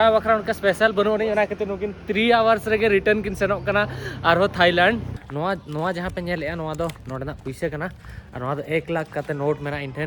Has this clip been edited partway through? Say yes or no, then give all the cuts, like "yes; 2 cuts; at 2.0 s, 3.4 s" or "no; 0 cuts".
yes; 1 cut; at 5.2 s